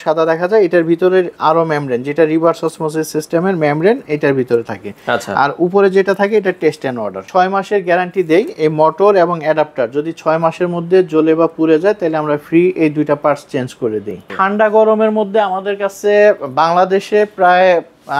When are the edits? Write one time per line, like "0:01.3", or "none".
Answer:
0:07.2
0:14.3